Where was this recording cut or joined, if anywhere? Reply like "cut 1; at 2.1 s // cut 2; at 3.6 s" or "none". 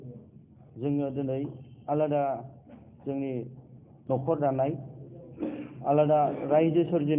none